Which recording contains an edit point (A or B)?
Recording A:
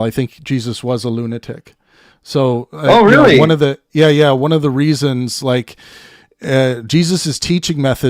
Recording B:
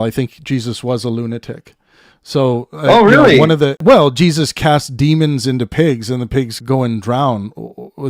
B